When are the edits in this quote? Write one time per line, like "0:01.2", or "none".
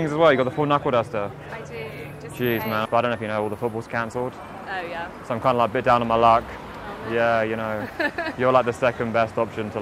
0:02.9